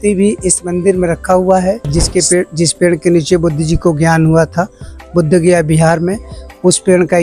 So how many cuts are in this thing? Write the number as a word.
one